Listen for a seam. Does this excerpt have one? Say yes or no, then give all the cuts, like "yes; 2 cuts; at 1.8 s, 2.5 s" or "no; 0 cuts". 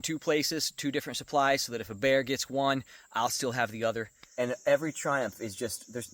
yes; 1 cut; at 4.2 s